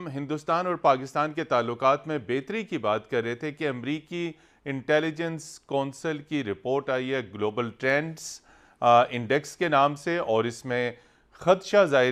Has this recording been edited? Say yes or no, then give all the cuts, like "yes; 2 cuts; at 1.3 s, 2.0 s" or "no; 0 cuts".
no; 0 cuts